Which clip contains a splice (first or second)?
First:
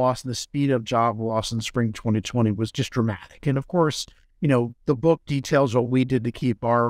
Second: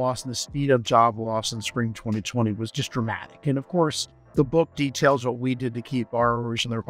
second